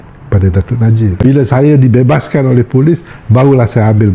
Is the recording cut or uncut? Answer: cut